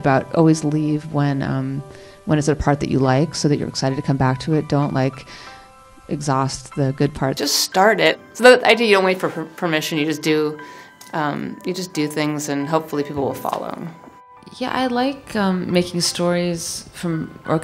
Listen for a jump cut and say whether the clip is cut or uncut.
cut